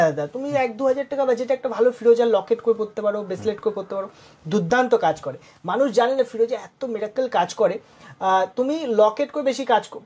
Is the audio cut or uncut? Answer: uncut